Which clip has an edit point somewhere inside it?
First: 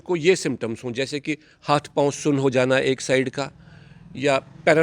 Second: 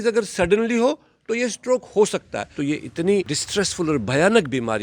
second; 2 cuts; at 2.5 s, 3.4 s

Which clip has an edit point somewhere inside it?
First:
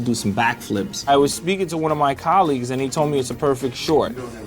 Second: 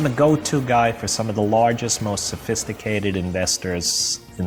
first; 1 cut; at 1.1 s

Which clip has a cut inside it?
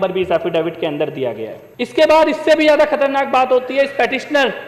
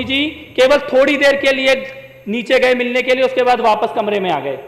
first; 1 cut; at 1.6 s

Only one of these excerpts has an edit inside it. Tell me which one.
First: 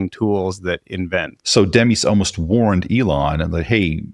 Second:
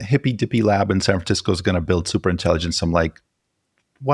first; 1 cut; at 1.3 s

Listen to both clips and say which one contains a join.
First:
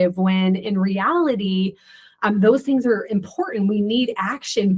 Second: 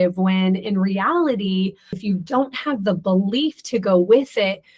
second; 1 cut; at 2.0 s

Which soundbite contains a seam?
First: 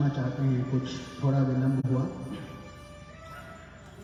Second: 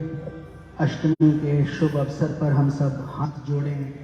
second; 1 cut; at 1.2 s

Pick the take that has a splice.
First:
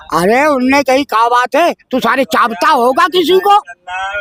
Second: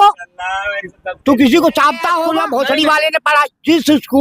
second; 1 cut; at 2.2 s

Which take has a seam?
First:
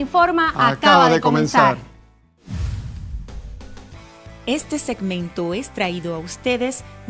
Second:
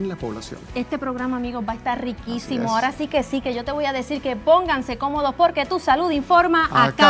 second; 1 cut; at 5.2 s

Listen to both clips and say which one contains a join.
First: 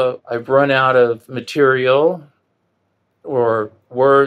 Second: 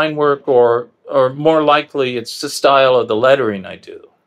second; 1 cut; at 2.3 s

